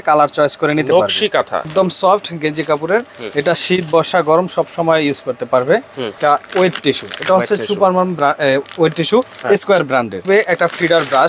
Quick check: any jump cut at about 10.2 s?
yes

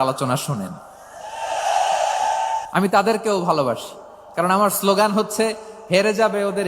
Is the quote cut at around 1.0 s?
no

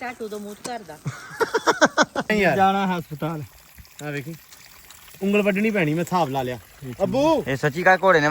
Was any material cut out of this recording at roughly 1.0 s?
no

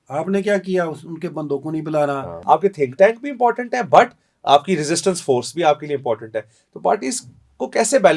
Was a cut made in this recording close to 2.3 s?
yes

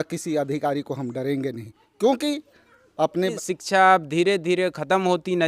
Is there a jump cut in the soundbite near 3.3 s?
yes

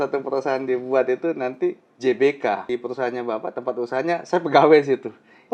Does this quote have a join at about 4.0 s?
no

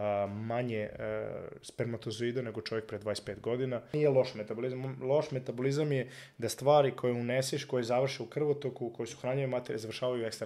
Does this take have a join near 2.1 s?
no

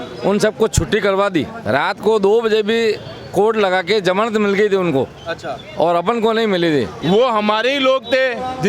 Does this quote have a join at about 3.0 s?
no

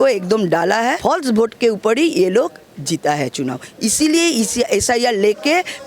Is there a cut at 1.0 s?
yes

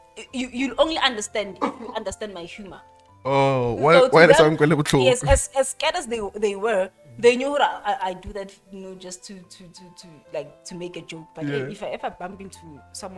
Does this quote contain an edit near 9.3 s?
no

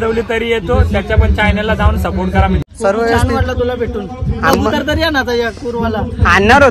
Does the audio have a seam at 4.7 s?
no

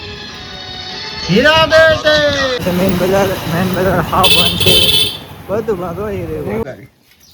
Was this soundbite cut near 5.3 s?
no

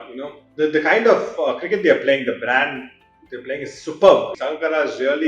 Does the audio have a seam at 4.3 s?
yes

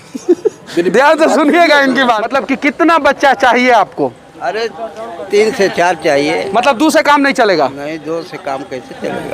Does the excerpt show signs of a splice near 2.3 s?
yes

